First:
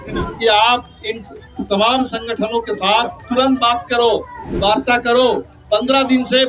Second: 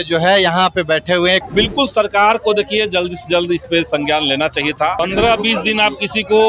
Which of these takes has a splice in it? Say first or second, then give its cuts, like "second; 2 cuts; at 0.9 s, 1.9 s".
second; 1 cut; at 1.4 s